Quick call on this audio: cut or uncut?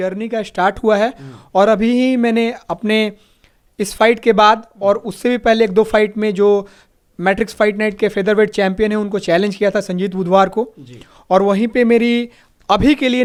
uncut